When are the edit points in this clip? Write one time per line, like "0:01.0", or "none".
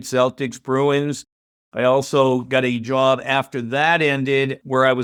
none

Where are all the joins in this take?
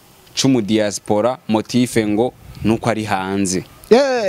none

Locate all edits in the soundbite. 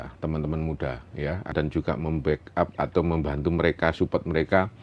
0:01.5

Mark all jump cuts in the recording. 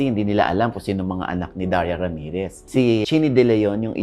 0:03.0

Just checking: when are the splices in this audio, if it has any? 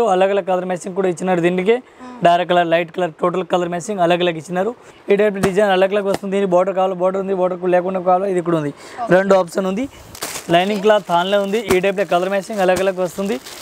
0:04.9
0:10.1

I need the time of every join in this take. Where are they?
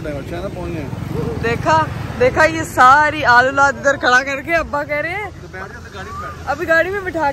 none

